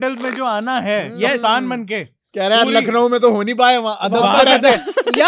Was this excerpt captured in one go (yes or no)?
yes